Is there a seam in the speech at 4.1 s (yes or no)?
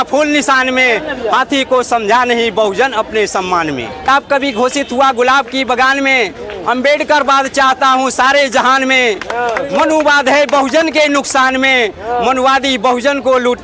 yes